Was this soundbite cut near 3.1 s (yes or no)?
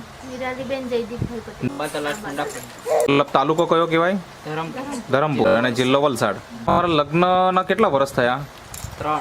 yes